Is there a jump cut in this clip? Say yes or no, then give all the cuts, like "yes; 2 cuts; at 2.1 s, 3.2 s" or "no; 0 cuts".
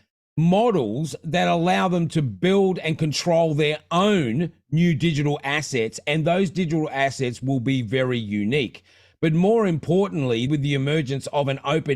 yes; 1 cut; at 10.5 s